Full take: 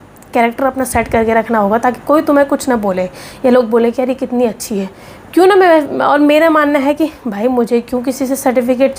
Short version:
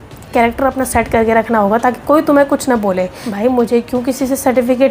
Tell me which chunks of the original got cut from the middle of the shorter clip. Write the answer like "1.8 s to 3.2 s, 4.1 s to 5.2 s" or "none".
3.2 s to 7.2 s